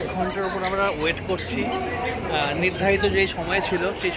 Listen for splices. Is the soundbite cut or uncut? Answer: uncut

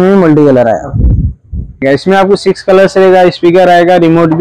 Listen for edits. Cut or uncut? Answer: cut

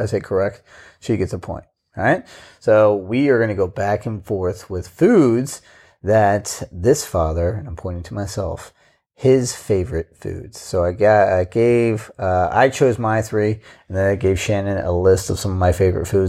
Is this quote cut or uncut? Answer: uncut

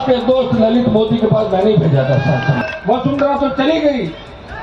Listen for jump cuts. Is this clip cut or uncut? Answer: cut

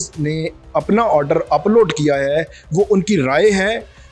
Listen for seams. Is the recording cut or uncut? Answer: uncut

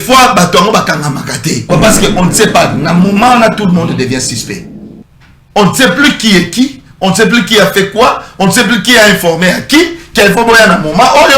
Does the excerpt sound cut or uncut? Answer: cut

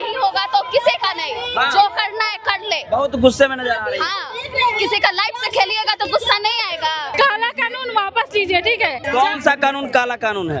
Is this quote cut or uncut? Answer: cut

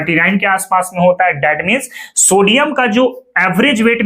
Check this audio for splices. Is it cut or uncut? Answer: uncut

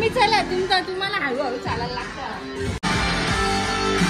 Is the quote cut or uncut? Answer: cut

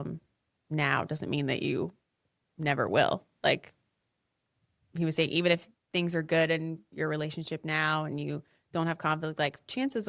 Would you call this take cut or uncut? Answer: uncut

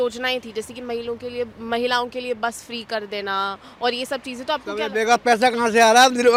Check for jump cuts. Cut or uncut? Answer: uncut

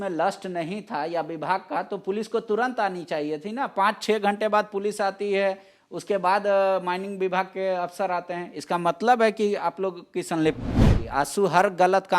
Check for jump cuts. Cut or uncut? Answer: cut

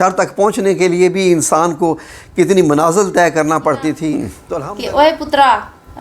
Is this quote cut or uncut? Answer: cut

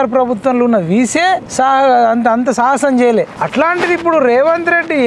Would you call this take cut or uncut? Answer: cut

